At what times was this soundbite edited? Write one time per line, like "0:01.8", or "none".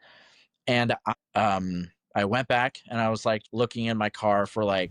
0:01.1
0:03.5

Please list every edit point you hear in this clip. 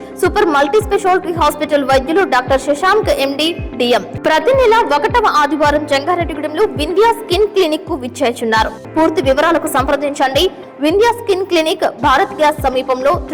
0:04.1
0:08.8

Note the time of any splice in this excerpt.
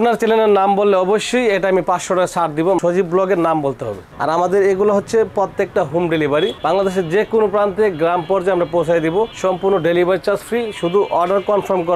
0:02.8
0:04.1

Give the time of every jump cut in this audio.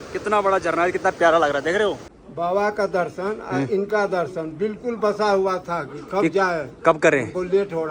0:02.1

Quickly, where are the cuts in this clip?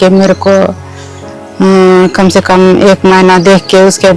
none

